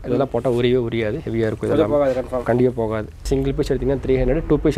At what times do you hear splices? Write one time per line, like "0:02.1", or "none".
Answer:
0:03.3